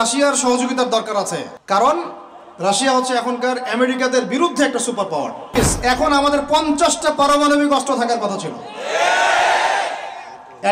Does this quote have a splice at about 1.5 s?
yes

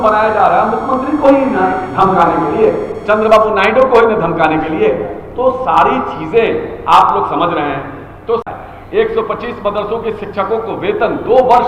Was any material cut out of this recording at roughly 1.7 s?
no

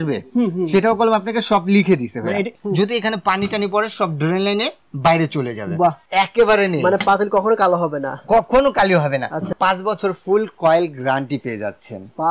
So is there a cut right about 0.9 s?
no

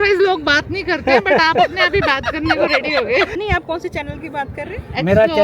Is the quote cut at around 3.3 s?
yes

